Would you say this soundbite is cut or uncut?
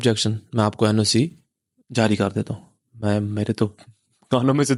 uncut